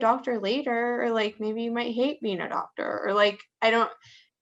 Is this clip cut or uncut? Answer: uncut